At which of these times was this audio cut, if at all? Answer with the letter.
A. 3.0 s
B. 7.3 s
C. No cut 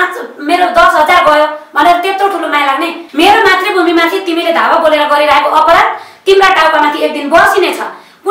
A